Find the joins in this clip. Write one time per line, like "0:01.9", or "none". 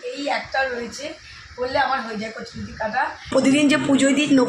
0:03.3